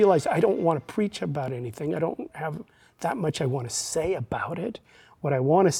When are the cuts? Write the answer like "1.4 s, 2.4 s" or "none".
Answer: none